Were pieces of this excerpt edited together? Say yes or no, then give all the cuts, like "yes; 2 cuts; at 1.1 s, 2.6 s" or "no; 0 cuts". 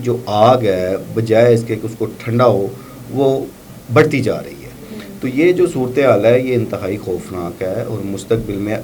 no; 0 cuts